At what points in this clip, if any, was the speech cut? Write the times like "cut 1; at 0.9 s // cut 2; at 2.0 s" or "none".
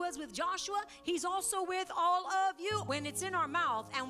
cut 1; at 2.8 s